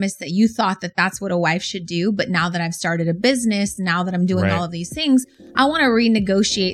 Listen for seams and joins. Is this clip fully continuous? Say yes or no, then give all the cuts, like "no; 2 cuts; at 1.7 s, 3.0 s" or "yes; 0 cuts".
yes; 0 cuts